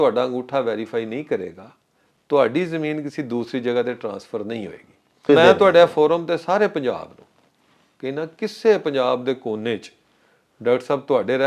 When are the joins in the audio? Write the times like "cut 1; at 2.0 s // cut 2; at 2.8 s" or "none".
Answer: cut 1; at 5.3 s